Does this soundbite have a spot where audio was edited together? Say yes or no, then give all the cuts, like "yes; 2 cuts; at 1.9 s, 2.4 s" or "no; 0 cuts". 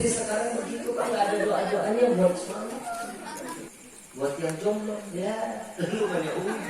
yes; 1 cut; at 3.6 s